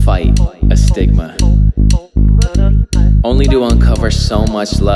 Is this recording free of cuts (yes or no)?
yes